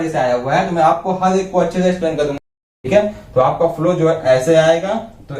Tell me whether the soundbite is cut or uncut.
cut